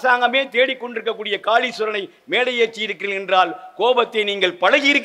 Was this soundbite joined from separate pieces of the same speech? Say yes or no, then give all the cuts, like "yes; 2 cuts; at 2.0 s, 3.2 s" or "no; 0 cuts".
no; 0 cuts